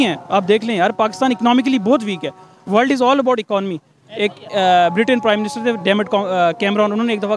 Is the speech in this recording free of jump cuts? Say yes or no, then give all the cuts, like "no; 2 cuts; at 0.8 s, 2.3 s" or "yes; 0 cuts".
yes; 0 cuts